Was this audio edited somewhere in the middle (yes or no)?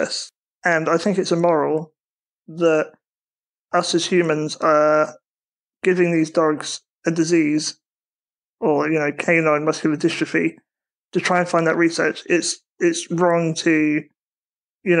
no